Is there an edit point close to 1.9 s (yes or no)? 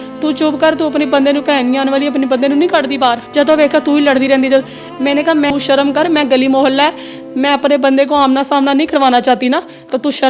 no